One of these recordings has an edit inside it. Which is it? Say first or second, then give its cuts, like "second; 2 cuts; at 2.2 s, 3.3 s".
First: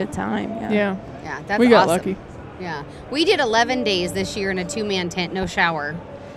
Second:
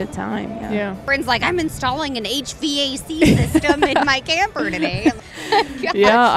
second; 2 cuts; at 1.0 s, 5.1 s